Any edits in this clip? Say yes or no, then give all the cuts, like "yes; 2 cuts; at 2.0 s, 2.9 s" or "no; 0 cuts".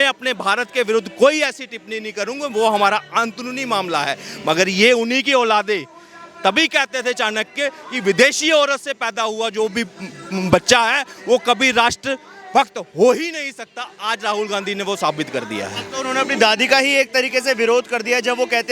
no; 0 cuts